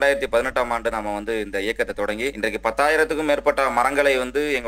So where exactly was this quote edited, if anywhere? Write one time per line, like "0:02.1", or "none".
0:02.4

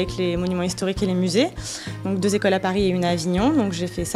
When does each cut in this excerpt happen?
0:02.0

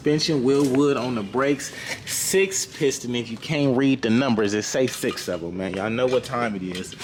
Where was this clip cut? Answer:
none

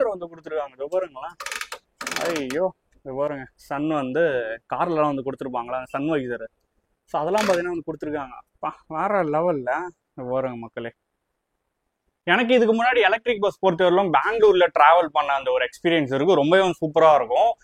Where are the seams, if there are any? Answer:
none

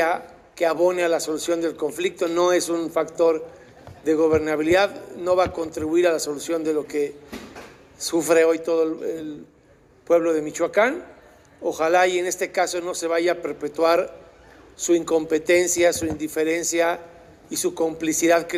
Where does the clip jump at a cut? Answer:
none

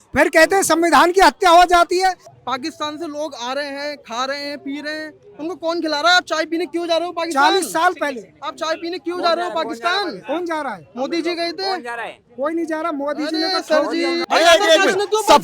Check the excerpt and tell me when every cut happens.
0:02.3
0:14.2

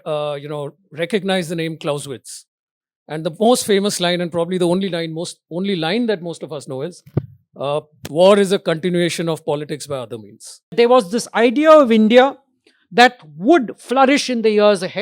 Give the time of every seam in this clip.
0:10.7

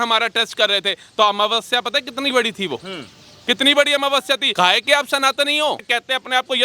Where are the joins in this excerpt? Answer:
0:04.5
0:05.9

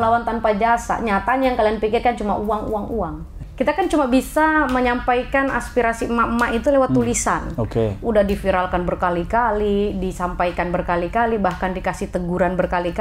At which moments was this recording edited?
0:03.4

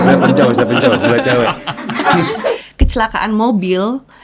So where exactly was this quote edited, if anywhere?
0:02.4

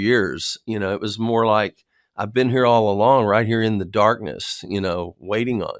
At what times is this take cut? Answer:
none

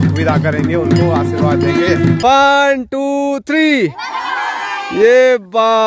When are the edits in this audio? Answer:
0:02.2

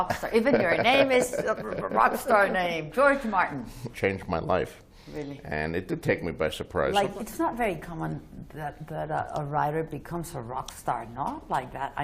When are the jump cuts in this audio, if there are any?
0:03.9
0:06.9

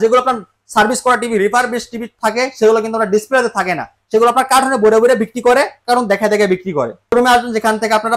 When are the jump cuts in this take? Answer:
0:07.1

